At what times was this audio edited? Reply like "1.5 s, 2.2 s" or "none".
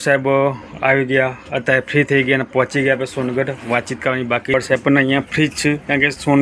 4.5 s